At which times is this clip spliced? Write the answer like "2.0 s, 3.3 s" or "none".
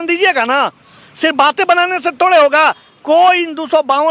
2.9 s